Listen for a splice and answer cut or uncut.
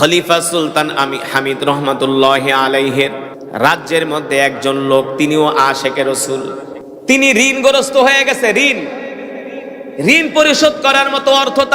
cut